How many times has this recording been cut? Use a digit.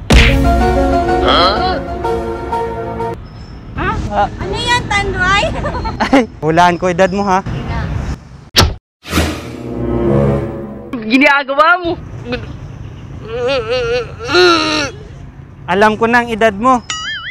1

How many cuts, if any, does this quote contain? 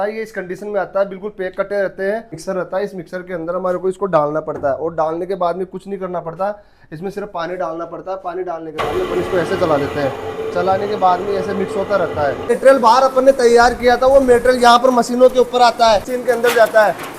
3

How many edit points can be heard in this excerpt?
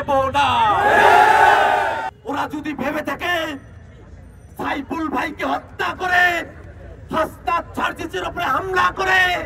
1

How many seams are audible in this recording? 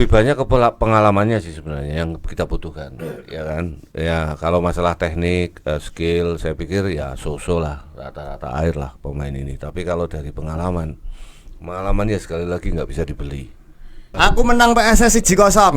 1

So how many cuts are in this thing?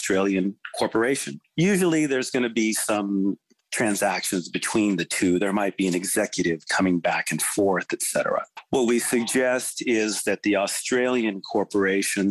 2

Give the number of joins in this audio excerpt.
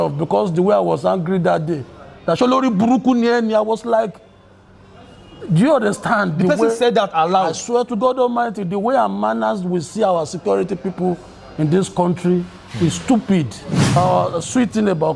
1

